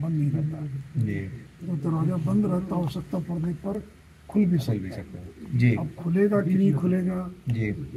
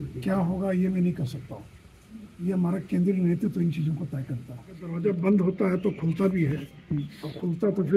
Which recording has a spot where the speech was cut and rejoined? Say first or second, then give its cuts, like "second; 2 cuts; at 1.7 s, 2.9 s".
second; 1 cut; at 4.9 s